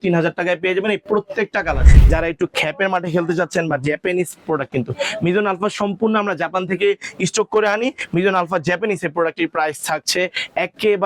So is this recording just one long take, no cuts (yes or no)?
no